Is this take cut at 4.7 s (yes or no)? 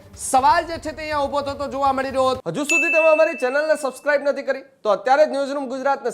no